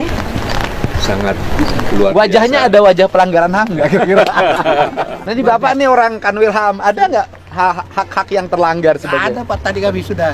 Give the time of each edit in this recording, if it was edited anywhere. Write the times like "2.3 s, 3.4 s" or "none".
5.2 s